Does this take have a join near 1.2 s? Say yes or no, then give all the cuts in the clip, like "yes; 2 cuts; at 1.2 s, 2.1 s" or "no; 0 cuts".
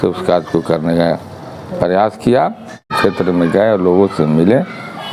no; 1 cut; at 2.9 s